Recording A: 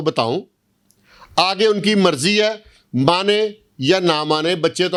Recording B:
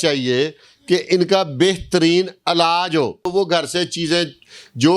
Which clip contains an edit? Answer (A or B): B